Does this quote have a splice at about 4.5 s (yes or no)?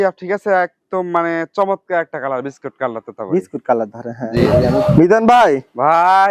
yes